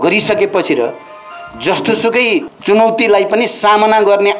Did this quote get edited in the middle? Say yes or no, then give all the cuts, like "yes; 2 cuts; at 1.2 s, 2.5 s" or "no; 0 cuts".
yes; 1 cut; at 2.5 s